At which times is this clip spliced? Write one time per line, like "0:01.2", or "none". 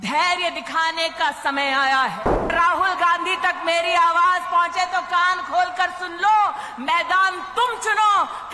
0:02.5